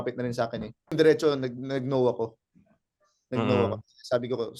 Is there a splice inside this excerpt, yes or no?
yes